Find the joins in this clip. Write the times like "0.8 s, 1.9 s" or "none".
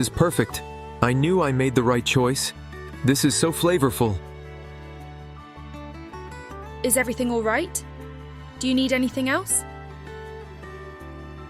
4.1 s, 6.8 s